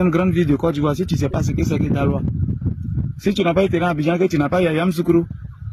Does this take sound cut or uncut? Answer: uncut